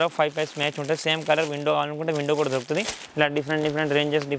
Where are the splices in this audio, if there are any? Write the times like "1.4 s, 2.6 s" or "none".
3.0 s

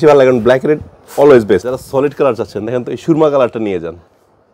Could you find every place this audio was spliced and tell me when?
1.6 s

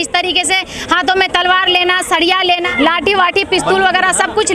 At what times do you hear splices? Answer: 2.7 s

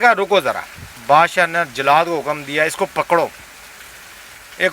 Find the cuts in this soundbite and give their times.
1.0 s

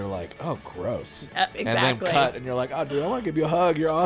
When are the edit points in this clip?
1.5 s

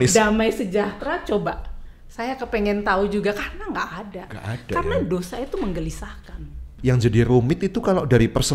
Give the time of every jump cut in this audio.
6.7 s

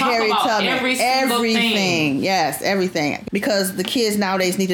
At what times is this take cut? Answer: 3.2 s

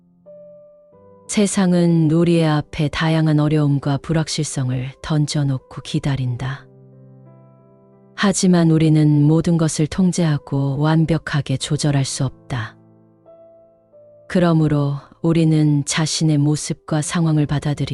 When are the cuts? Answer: none

